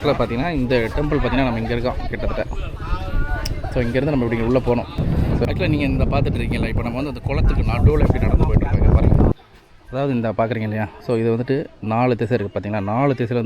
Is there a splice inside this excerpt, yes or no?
yes